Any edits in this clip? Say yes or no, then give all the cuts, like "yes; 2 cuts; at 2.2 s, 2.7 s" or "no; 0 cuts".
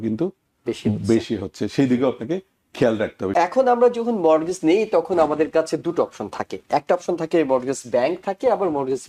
yes; 1 cut; at 3.3 s